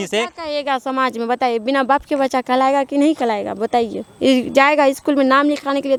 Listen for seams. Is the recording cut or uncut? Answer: uncut